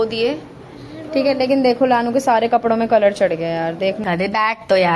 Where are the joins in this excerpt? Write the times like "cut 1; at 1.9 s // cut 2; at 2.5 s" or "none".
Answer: cut 1; at 4.0 s